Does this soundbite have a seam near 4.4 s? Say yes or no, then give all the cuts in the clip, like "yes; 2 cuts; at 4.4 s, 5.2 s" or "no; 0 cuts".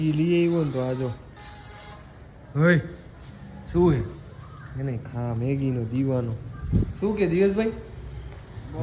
no; 0 cuts